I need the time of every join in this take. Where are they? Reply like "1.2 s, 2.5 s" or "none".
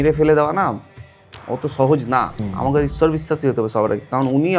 2.4 s